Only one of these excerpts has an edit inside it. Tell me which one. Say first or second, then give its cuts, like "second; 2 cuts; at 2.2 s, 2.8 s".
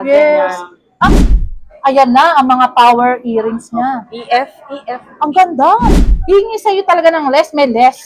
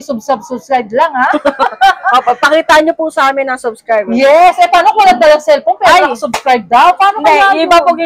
first; 2 cuts; at 1.1 s, 6.0 s